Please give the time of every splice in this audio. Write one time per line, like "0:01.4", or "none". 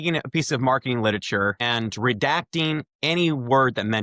none